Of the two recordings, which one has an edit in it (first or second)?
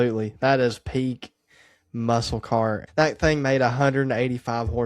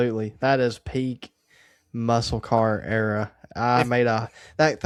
first